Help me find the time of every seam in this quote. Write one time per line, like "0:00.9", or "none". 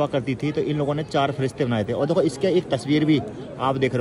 none

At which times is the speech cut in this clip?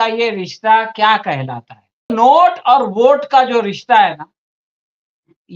0:02.1

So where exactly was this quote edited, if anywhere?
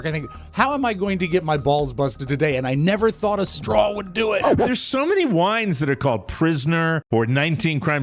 0:04.5
0:07.0

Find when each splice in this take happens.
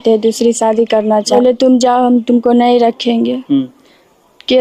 0:01.3

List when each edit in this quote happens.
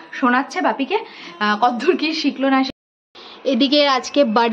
0:02.7

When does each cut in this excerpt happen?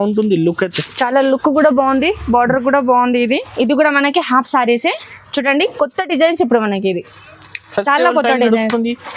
0:03.5

